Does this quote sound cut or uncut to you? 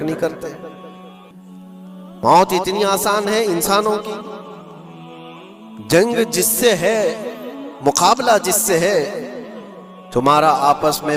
uncut